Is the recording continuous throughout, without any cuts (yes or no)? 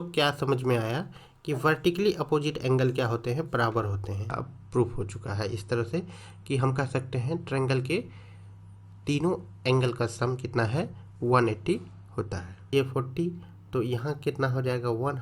no